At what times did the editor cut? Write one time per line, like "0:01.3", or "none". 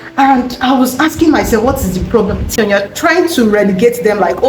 0:02.5